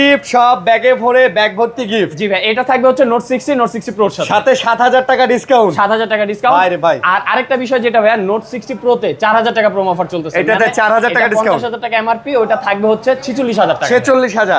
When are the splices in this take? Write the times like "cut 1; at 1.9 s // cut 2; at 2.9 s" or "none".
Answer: none